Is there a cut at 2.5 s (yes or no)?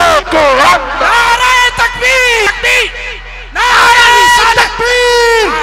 yes